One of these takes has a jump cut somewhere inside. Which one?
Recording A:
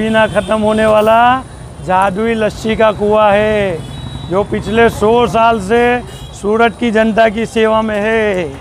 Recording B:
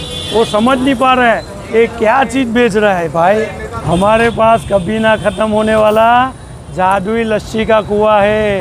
B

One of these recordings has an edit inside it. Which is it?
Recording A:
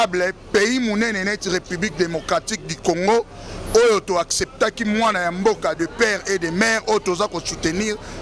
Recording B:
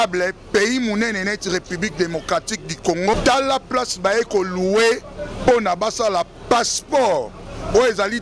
B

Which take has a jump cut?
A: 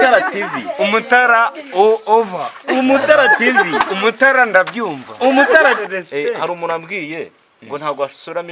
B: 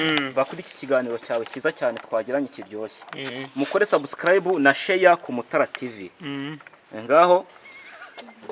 A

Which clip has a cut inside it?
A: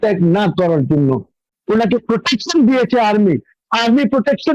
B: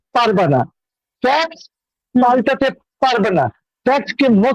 A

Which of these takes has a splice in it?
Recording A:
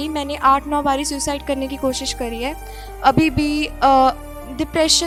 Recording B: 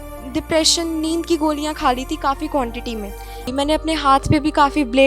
B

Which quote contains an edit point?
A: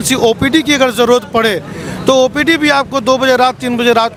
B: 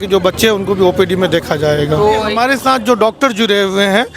B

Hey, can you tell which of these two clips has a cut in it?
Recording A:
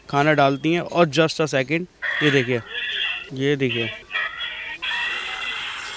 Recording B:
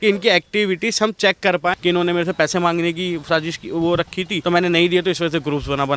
B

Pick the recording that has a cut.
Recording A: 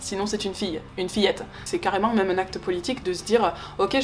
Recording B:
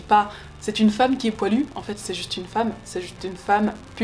A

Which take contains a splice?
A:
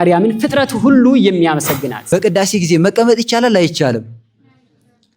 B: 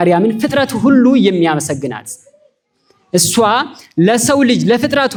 A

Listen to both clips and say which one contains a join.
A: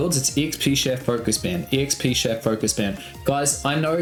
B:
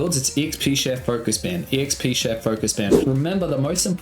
B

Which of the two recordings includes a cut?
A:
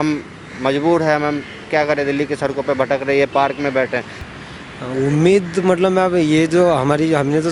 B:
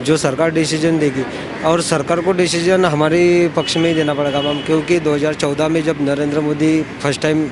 A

